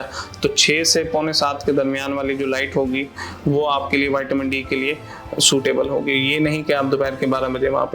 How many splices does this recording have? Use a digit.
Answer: 0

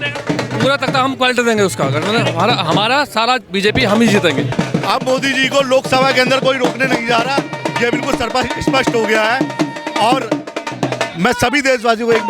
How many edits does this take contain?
1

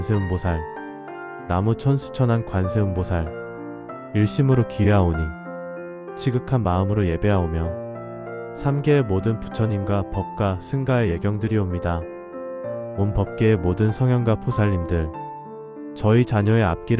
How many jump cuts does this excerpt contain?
2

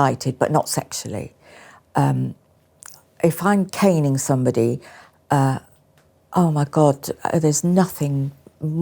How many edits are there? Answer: 0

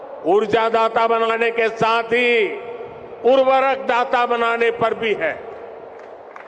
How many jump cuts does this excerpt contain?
0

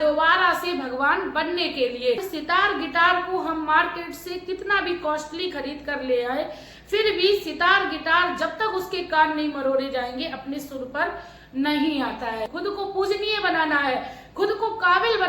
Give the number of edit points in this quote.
2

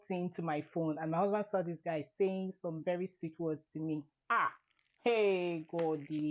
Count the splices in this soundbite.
0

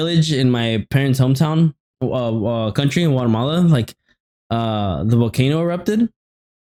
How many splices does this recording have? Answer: 0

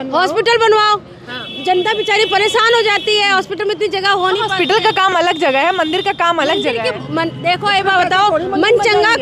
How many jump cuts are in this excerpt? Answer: 0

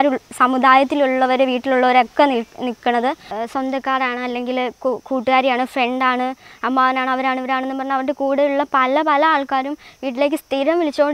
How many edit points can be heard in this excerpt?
1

